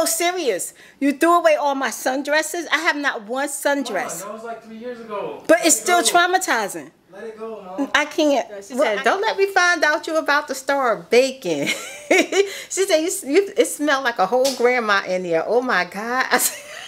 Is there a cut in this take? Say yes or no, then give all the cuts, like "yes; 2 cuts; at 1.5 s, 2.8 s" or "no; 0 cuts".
yes; 1 cut; at 8.9 s